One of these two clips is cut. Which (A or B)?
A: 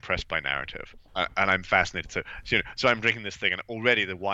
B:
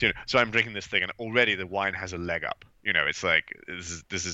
A